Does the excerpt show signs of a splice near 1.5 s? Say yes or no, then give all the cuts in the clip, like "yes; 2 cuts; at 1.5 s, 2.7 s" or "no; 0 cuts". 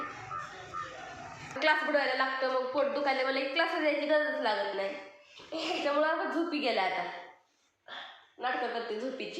yes; 1 cut; at 1.5 s